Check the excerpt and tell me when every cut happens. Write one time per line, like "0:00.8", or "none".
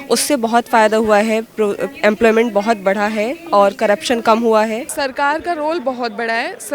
0:04.9

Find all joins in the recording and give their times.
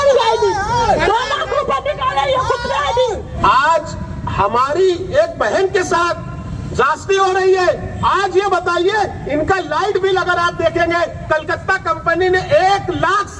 0:03.3

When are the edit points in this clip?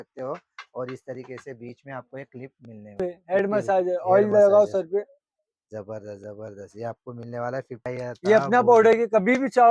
0:03.0
0:07.8

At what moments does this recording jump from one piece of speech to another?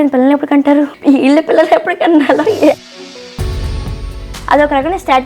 0:00.9

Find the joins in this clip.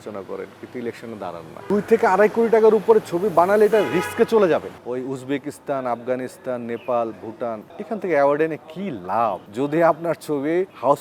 0:01.5
0:04.8

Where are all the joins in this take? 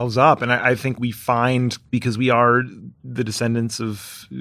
0:01.0

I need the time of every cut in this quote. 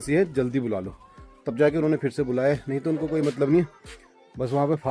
none

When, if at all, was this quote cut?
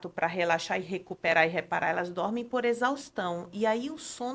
none

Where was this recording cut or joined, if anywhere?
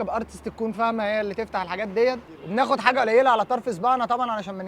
0:02.3

